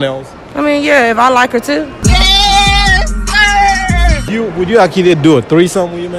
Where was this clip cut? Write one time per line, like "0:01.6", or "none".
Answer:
0:02.0
0:04.3